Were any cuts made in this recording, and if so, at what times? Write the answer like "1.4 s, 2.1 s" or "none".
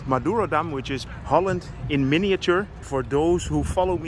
1.0 s, 2.8 s